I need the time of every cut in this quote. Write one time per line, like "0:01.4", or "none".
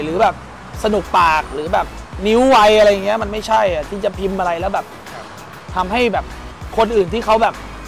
0:02.0